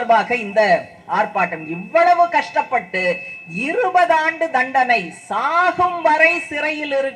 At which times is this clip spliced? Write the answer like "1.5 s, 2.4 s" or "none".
none

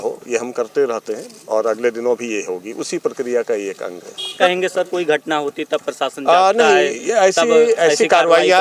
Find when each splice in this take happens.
4.4 s

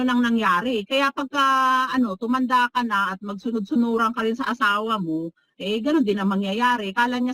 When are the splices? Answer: none

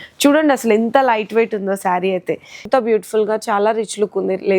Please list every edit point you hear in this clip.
2.6 s

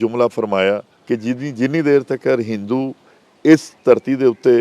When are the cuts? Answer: 0.9 s

